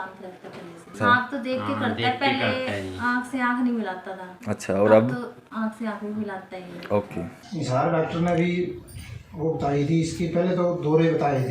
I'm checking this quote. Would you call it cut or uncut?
cut